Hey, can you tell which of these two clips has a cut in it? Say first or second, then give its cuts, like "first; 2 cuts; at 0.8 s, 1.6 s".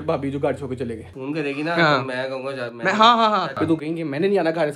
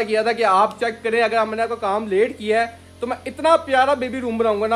first; 2 cuts; at 1.1 s, 3.5 s